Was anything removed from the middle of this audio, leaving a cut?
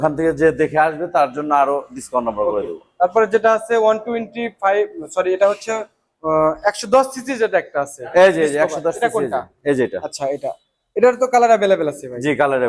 no; 0 cuts

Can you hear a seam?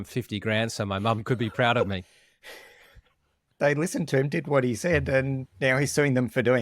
yes; 2 cuts; at 2.2 s, 3.5 s

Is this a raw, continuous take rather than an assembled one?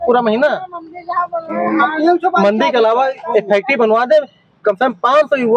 yes; 0 cuts

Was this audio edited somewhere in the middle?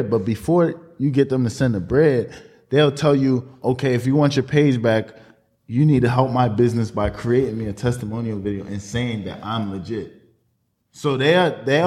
no; 0 cuts

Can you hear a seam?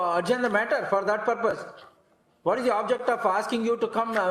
no; 0 cuts

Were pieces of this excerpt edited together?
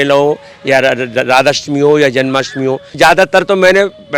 yes; 1 cut; at 3.0 s

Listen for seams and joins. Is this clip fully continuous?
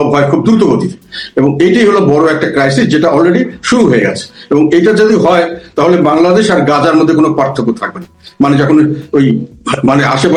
yes; 0 cuts

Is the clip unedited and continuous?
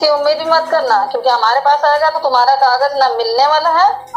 yes; 0 cuts

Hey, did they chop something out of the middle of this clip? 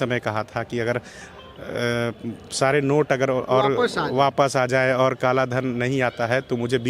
no; 0 cuts

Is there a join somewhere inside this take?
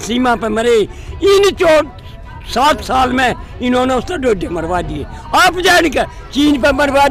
no; 0 cuts

